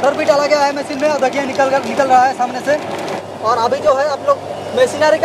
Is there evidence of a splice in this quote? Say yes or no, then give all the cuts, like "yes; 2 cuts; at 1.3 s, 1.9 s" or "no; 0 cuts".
yes; 1 cut; at 3.1 s